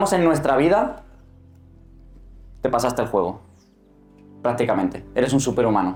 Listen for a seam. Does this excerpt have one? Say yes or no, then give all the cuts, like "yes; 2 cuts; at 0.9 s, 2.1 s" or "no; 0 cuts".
no; 0 cuts